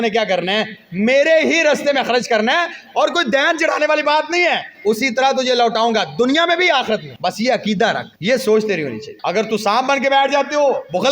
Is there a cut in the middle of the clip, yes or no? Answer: yes